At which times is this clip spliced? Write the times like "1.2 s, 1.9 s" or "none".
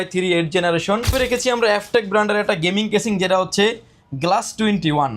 1.1 s